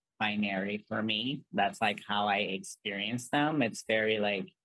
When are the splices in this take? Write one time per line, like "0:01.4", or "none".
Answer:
none